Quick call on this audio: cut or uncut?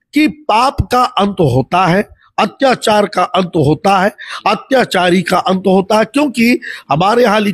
uncut